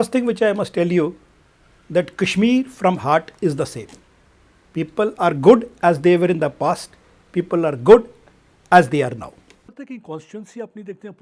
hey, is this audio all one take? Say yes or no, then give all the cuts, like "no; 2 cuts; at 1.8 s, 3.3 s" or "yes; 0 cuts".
no; 1 cut; at 9.6 s